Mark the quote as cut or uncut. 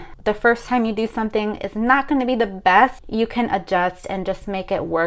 uncut